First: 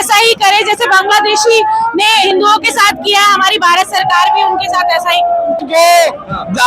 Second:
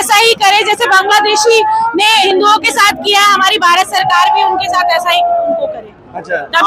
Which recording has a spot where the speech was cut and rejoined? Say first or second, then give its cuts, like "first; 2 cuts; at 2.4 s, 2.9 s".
first; 1 cut; at 5.6 s